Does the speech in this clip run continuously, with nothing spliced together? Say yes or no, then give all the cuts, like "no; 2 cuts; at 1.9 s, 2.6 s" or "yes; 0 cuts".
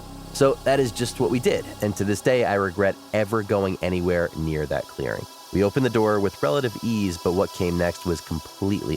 no; 1 cut; at 5.3 s